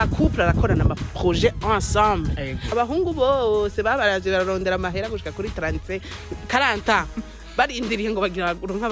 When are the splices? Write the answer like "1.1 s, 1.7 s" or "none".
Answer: 2.6 s